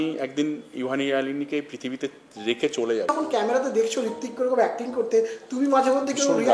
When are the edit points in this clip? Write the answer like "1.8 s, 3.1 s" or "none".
3.1 s